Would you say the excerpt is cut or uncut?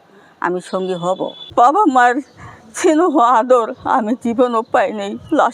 cut